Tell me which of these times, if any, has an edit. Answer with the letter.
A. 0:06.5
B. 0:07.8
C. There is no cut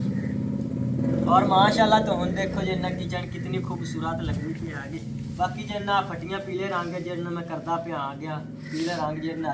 C